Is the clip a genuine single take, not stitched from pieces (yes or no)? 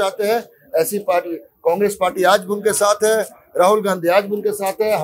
yes